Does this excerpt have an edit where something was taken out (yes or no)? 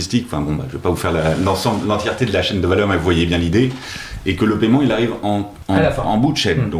yes